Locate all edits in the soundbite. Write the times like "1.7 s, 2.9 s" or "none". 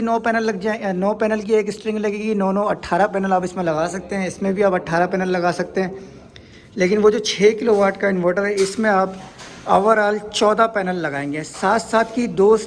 none